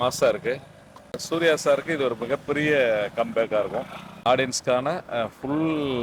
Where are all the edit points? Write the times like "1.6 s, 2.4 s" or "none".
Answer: 1.2 s, 4.1 s